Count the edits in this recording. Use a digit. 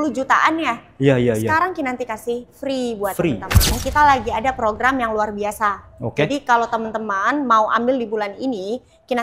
1